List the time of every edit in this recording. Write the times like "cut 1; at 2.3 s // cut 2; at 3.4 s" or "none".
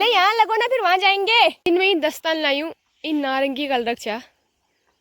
cut 1; at 1.6 s